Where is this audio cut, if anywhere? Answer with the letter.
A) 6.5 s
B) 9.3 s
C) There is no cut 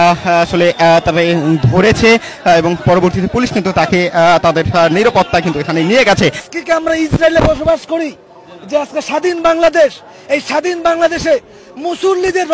A